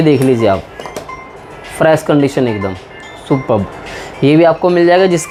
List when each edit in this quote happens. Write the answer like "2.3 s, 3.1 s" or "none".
none